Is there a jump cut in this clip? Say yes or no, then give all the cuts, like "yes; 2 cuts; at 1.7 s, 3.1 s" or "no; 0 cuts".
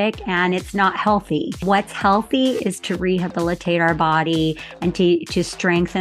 yes; 1 cut; at 1.6 s